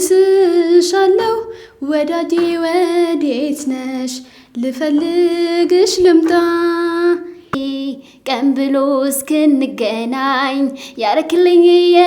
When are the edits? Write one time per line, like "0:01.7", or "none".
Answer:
0:07.5